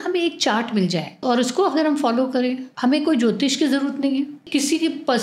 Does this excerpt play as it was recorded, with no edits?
no; 3 cuts; at 1.1 s, 2.7 s, 4.4 s

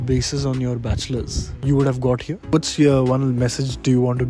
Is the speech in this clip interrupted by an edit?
yes; 1 cut; at 2.3 s

